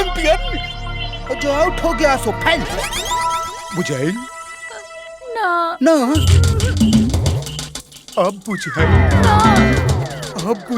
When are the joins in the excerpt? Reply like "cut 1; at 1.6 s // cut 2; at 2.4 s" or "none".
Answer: none